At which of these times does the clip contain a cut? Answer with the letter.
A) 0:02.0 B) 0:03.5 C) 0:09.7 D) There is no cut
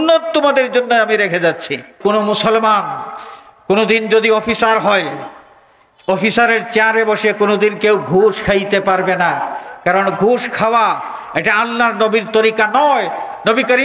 A